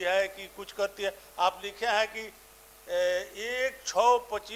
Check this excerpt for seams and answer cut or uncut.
uncut